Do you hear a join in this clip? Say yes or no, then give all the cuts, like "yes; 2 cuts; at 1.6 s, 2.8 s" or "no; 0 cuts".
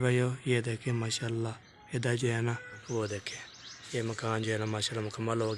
yes; 1 cut; at 2.8 s